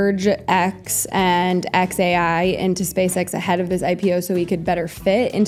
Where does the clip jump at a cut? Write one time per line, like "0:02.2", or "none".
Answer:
none